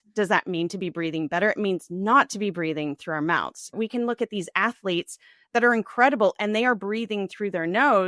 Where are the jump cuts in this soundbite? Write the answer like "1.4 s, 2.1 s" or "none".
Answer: 3.7 s